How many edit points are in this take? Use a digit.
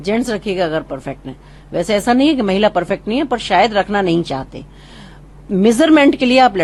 0